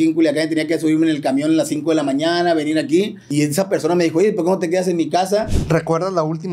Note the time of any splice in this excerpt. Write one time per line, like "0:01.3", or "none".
0:05.5